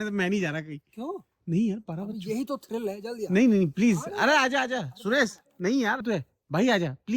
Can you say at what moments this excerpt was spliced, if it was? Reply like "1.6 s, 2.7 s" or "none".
6.0 s

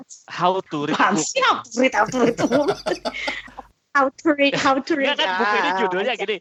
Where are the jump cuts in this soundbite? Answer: none

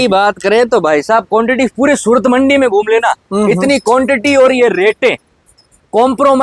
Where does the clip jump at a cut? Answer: none

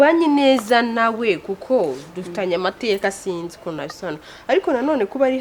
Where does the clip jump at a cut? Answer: none

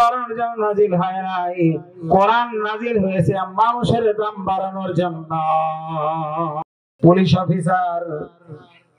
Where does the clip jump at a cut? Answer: 6.8 s

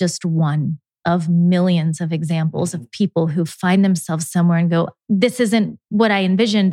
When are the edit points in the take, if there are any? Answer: 0.9 s

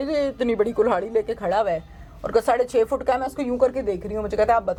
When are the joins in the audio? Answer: none

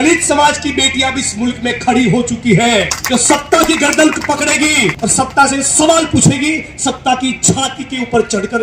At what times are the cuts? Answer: 3.0 s, 5.0 s

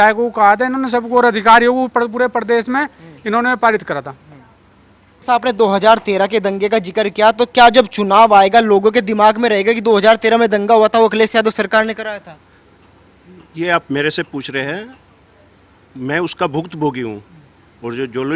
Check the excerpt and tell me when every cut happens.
5.2 s

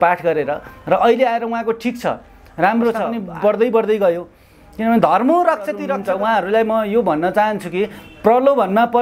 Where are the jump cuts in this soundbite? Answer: 3.2 s, 5.9 s

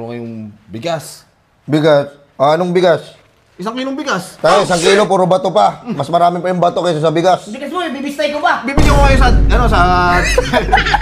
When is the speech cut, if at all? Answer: none

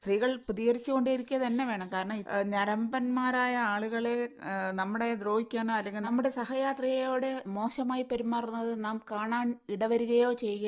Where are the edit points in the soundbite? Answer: 2.2 s

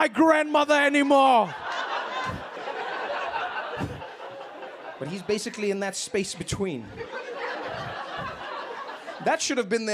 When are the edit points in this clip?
2.6 s

